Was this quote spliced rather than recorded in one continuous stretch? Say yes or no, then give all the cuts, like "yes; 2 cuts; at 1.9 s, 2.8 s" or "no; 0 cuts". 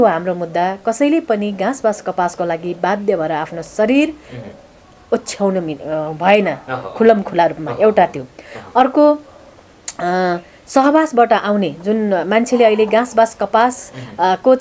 no; 0 cuts